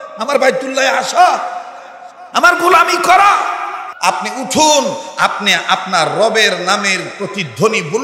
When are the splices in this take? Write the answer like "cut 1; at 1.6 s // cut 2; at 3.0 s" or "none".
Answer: cut 1; at 3.9 s